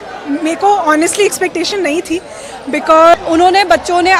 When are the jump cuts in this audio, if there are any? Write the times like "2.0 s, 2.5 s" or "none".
3.1 s